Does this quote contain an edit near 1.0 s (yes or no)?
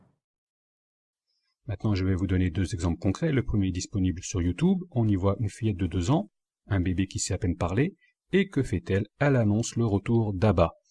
no